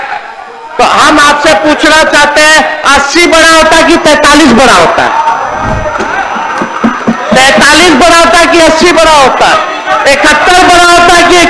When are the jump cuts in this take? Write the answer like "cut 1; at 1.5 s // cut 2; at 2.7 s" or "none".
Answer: none